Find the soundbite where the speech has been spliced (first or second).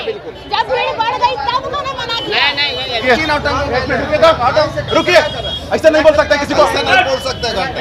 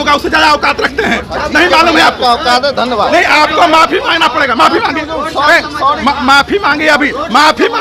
first